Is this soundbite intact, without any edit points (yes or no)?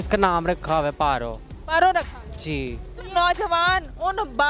no